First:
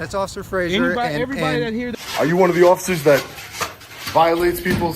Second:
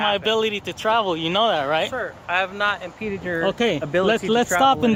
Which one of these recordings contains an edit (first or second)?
first